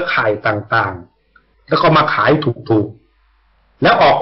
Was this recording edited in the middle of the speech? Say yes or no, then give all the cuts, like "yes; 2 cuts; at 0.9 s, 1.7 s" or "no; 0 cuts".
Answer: no; 0 cuts